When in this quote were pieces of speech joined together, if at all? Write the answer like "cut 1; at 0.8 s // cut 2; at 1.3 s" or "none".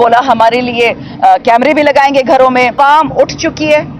cut 1; at 2.8 s